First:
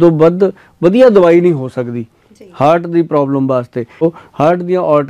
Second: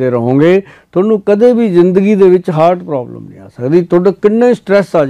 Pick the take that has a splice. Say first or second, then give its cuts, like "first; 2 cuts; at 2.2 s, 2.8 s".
first; 1 cut; at 4.0 s